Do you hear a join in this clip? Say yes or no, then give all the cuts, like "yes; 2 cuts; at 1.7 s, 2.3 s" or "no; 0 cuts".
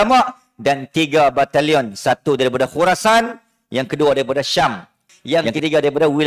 yes; 1 cut; at 5.1 s